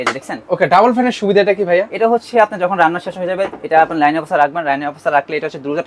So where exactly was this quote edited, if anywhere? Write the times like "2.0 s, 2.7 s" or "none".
none